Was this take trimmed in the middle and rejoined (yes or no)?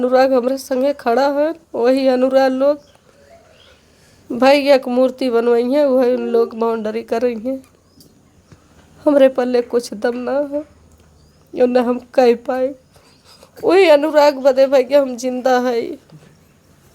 no